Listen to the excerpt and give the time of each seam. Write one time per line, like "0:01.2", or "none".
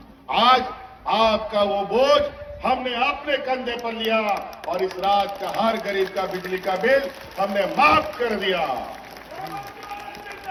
none